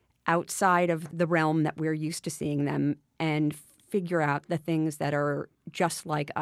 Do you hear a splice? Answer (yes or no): yes